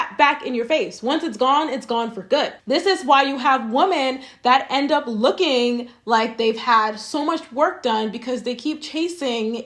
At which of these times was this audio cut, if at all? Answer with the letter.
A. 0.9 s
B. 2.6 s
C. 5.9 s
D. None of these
B